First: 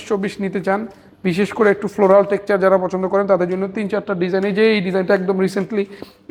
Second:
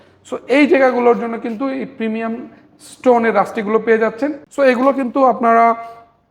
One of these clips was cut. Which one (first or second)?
second